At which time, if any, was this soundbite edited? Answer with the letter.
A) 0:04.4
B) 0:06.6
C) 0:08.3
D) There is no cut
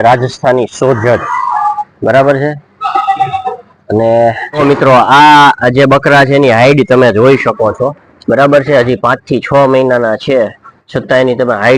A